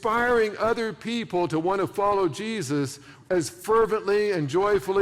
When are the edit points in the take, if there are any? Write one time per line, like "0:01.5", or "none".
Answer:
none